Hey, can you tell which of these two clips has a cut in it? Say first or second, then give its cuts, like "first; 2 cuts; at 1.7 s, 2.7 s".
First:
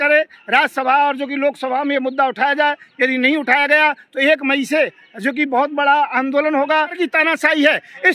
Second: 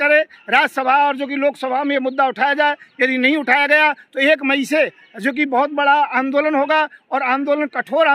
first; 1 cut; at 6.9 s